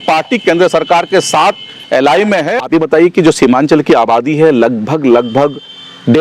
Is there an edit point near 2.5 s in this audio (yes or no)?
yes